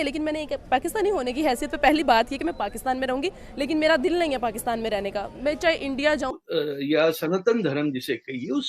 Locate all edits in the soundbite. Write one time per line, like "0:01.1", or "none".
0:06.4